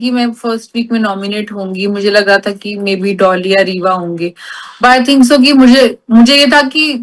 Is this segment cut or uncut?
uncut